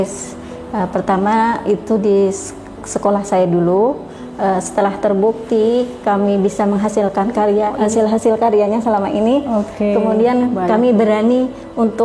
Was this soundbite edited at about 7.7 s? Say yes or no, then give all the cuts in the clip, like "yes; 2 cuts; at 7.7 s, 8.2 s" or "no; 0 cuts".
yes; 1 cut; at 7.7 s